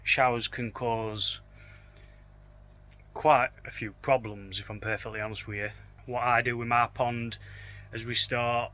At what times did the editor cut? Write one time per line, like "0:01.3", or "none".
0:05.9